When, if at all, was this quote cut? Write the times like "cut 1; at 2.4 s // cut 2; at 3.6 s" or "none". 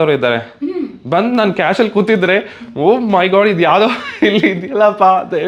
none